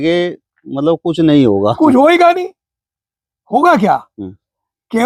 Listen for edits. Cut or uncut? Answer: uncut